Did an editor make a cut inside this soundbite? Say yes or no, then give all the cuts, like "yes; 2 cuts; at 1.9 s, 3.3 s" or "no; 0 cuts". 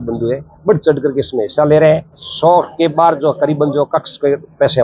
yes; 1 cut; at 2.3 s